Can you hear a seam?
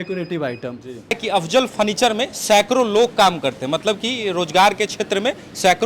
yes; 1 cut; at 1.2 s

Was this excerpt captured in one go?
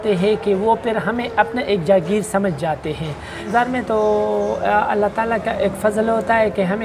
no; 1 cut; at 3.5 s

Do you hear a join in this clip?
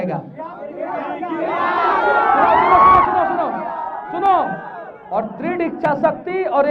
no; 0 cuts

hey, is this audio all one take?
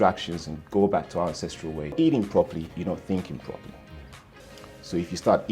no; 1 cut; at 1.9 s

